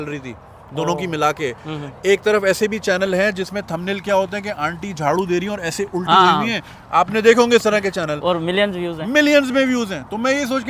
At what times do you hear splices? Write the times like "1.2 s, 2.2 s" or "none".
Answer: none